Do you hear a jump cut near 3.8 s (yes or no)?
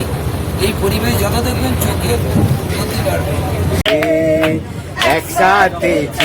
yes